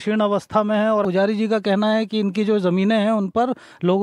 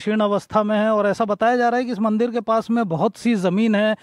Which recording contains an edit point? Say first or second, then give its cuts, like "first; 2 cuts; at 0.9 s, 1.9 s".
first; 1 cut; at 1.0 s